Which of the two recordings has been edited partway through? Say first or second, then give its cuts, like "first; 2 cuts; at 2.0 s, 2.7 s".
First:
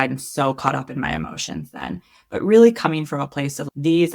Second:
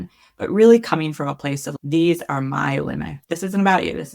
second; 1 cut; at 3.1 s